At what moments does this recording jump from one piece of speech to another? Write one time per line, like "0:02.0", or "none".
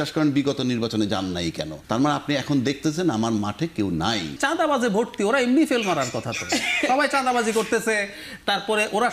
0:01.8
0:04.4